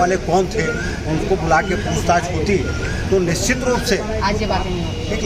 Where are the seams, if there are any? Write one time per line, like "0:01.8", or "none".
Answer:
none

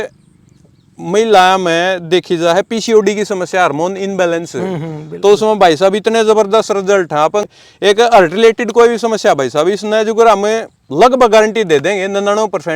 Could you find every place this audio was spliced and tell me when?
0:07.5

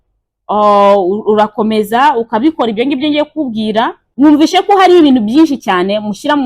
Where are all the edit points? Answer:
0:04.0

